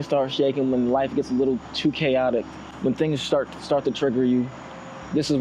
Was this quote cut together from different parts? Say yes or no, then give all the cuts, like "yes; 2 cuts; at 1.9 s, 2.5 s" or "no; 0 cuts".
no; 0 cuts